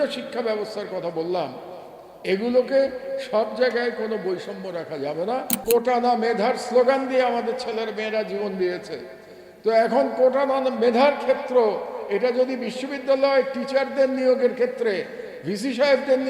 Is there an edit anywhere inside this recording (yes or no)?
yes